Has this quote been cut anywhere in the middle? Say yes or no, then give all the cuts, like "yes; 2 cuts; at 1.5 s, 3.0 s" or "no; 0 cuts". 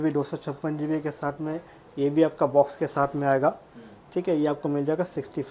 no; 0 cuts